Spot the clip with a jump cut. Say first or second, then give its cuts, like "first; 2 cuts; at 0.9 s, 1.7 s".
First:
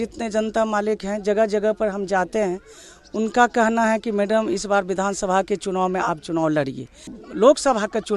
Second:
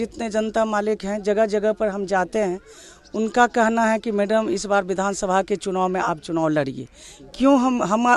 first; 1 cut; at 7.2 s